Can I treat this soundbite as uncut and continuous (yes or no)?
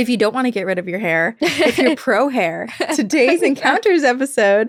yes